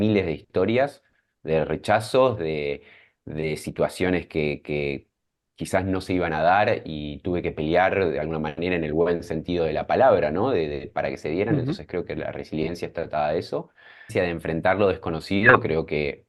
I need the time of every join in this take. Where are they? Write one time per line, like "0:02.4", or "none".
0:14.1